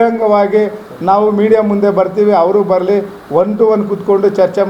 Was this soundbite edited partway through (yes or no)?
no